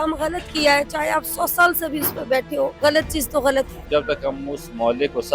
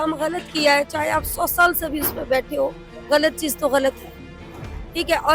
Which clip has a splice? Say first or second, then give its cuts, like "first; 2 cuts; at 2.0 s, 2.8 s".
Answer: first; 2 cuts; at 2.7 s, 3.9 s